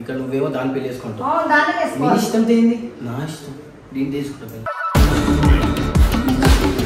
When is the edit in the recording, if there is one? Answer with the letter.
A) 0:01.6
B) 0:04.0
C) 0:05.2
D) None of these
D